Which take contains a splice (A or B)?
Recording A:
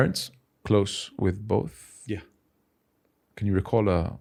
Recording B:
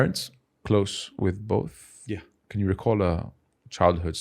B